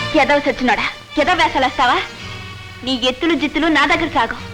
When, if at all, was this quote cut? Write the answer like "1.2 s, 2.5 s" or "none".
none